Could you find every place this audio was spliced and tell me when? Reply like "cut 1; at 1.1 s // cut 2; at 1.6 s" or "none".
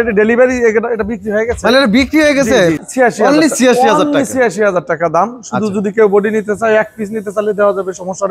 cut 1; at 2.8 s